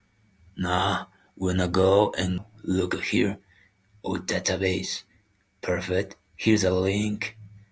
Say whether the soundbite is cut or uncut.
cut